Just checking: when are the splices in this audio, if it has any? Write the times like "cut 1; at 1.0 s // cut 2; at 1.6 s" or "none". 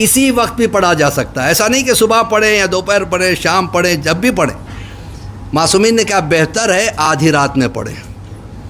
none